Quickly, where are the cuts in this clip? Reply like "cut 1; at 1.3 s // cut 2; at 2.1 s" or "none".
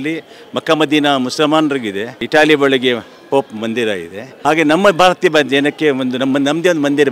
none